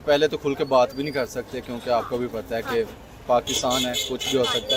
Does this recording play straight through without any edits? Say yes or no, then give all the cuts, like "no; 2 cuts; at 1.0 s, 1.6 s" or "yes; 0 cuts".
yes; 0 cuts